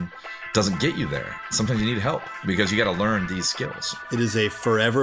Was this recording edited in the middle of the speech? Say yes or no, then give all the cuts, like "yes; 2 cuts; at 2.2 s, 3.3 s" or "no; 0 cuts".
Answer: yes; 1 cut; at 4.1 s